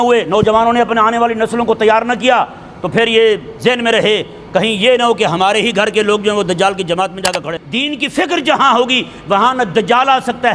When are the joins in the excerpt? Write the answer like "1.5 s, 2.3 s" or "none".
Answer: 7.5 s